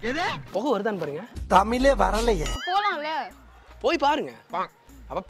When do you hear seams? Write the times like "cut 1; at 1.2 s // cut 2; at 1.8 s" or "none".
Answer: cut 1; at 1.3 s // cut 2; at 2.6 s